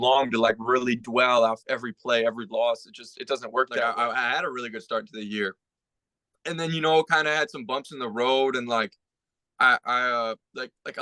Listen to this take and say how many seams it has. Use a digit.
1